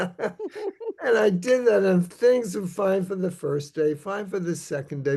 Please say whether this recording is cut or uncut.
uncut